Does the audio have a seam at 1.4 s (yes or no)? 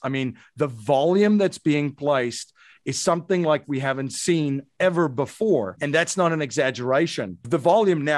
no